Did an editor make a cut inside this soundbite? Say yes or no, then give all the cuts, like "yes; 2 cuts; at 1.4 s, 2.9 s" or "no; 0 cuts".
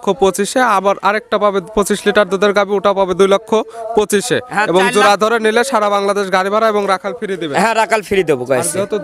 no; 0 cuts